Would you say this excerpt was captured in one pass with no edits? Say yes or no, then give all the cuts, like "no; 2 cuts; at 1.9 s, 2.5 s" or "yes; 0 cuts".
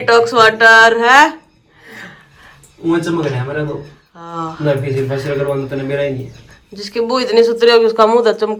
yes; 0 cuts